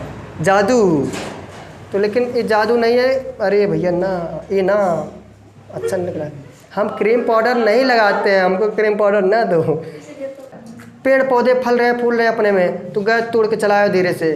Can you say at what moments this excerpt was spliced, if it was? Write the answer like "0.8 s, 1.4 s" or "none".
10.5 s